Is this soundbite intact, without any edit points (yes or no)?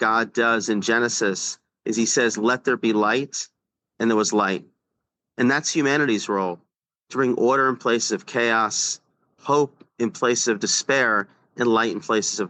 yes